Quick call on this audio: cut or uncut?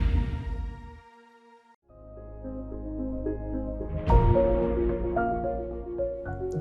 cut